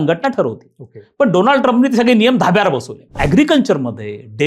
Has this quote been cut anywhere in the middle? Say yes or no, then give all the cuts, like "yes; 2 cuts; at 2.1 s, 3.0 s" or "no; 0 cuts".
yes; 1 cut; at 3.2 s